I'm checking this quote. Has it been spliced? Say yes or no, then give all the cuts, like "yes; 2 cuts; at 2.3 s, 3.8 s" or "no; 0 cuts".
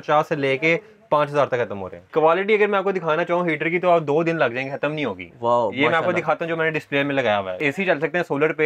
yes; 2 cuts; at 2.1 s, 7.6 s